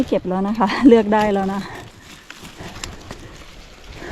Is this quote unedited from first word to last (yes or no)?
yes